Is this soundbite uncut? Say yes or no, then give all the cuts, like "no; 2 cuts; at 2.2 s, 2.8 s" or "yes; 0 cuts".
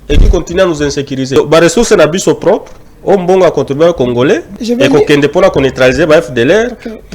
no; 2 cuts; at 1.3 s, 4.5 s